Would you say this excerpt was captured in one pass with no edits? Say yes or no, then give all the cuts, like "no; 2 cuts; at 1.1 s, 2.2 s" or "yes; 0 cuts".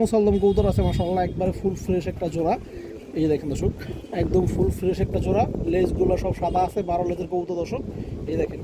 yes; 0 cuts